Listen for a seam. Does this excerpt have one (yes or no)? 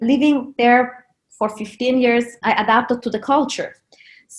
no